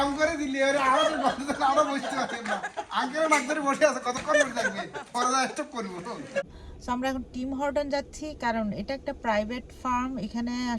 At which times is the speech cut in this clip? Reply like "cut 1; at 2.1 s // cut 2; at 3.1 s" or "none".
cut 1; at 6.5 s